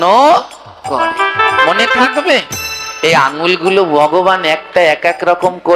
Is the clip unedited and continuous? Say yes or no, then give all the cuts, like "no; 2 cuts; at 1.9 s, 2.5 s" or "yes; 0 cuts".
yes; 0 cuts